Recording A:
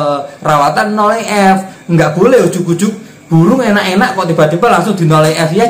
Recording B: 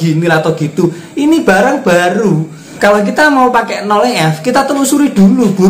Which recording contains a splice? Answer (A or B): B